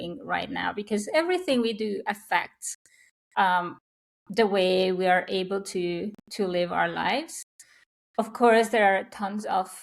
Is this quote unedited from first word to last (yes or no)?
yes